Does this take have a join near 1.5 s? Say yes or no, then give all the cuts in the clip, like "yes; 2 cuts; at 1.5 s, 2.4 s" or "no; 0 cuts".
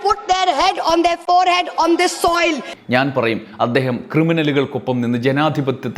no; 1 cut; at 2.7 s